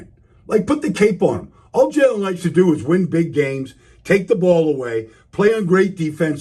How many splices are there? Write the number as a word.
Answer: zero